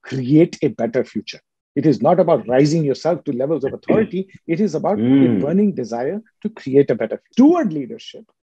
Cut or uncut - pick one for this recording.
cut